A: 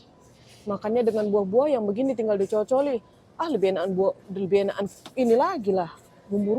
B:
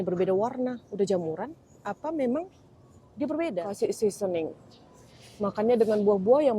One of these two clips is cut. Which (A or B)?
B